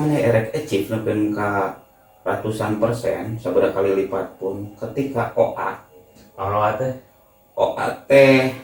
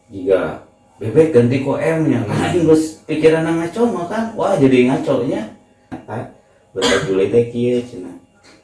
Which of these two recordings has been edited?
second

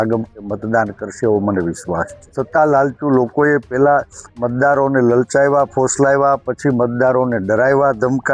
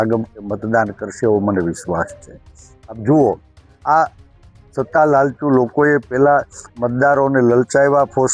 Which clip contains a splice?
first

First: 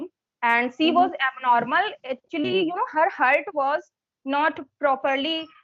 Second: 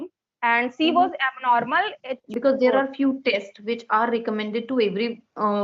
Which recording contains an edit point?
second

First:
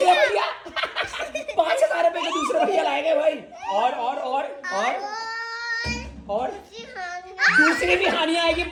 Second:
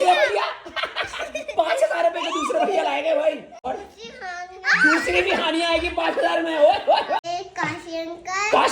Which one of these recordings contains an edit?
second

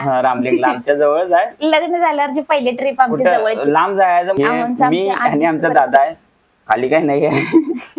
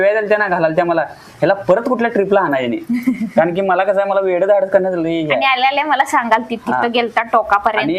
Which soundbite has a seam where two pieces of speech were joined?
first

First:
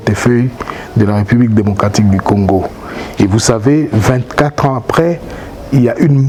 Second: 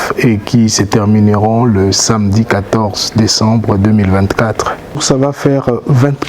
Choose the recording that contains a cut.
second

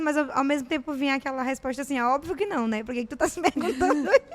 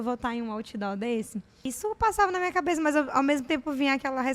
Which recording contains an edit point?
second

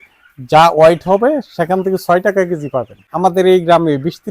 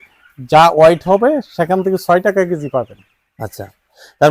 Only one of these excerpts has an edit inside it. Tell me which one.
first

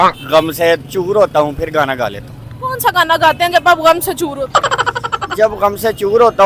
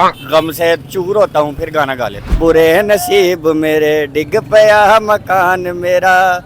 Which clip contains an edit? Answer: second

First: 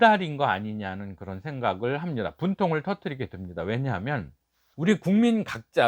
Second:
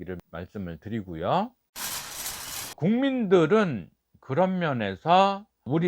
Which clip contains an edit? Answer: second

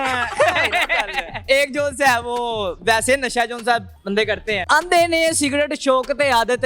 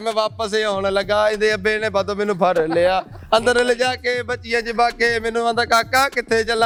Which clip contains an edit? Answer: first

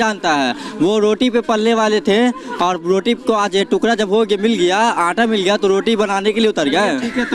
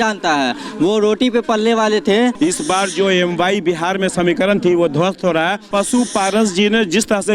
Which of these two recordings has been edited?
second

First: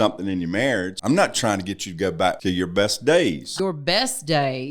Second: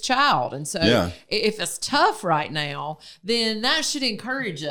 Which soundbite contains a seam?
first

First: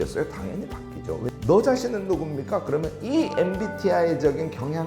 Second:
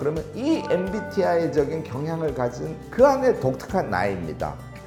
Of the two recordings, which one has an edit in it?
first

